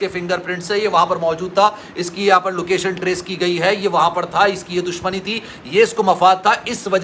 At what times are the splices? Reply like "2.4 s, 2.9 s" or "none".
none